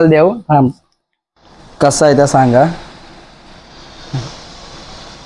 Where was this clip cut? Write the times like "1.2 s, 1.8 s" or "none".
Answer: none

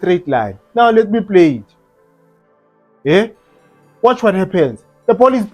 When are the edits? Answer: none

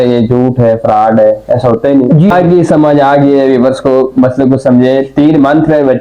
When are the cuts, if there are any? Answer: 2.3 s

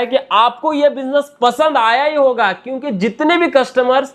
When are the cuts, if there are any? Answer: none

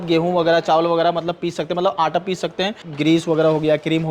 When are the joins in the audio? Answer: 2.8 s

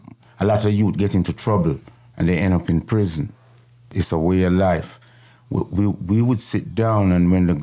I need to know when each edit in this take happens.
3.8 s

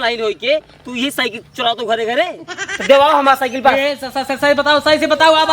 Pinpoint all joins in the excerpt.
2.7 s

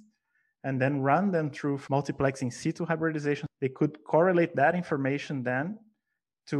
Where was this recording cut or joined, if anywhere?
1.8 s, 3.5 s

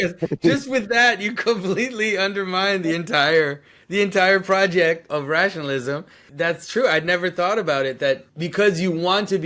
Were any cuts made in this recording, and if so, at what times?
5.1 s, 6.2 s, 8.3 s

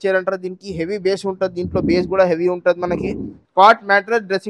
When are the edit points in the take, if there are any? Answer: 3.4 s

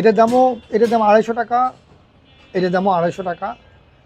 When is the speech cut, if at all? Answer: none

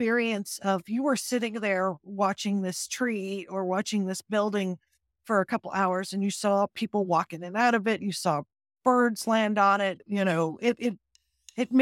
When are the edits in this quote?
10.0 s

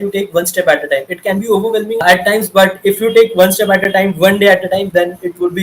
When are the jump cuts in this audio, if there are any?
2.0 s

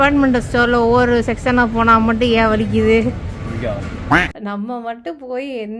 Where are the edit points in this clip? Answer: none

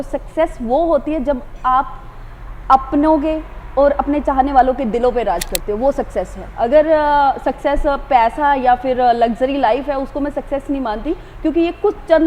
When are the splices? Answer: none

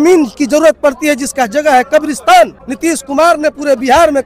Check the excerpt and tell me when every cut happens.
2.6 s

